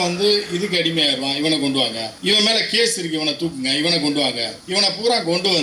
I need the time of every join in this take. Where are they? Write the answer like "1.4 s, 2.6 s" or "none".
2.1 s, 4.5 s